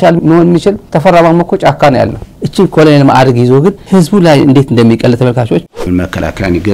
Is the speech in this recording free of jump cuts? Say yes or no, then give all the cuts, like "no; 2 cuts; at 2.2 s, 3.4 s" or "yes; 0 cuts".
no; 2 cuts; at 2.3 s, 5.7 s